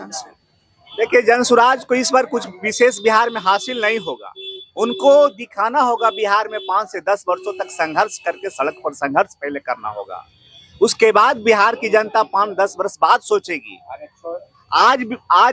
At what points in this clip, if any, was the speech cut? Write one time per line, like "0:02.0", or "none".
none